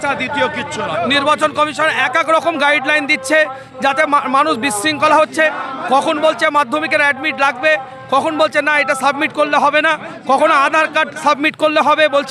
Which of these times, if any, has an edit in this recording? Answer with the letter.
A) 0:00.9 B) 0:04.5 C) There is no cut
A